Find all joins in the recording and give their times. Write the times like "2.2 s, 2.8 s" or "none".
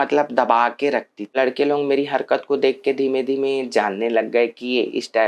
1.3 s